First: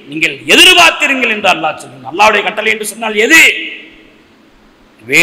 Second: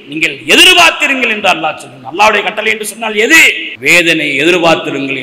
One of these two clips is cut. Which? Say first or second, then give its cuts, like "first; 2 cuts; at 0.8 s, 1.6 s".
second; 1 cut; at 3.6 s